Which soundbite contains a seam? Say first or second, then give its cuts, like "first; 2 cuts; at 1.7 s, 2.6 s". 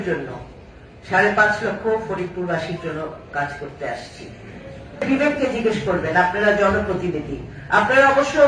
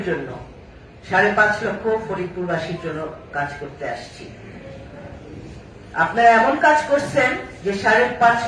first; 1 cut; at 5.0 s